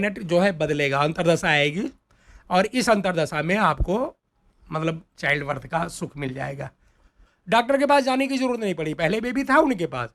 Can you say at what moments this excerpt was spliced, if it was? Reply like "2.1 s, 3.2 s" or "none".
none